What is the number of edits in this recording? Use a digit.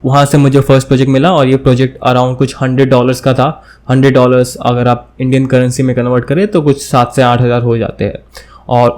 0